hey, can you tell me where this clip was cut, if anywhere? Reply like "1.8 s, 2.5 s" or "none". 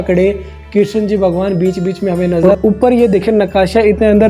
2.5 s